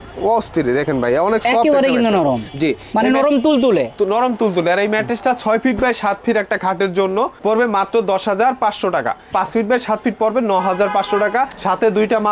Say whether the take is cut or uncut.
uncut